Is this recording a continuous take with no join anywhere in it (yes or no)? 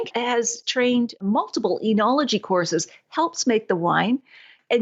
yes